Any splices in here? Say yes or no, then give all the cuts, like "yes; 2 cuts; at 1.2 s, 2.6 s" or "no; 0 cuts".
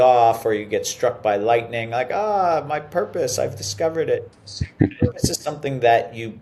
no; 0 cuts